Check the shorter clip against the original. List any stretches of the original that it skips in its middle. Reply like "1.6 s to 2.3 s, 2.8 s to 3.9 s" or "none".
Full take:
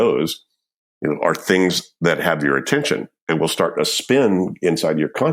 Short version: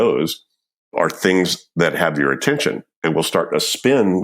0.9 s to 1.2 s